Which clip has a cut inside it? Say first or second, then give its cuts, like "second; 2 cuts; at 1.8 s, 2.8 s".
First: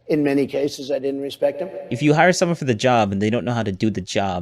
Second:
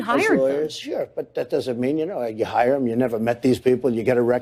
first; 1 cut; at 1.9 s